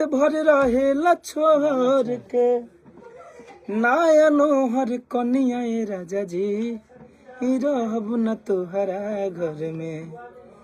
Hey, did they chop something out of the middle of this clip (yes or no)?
no